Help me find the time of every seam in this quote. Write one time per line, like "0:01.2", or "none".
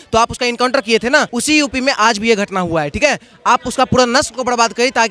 0:01.3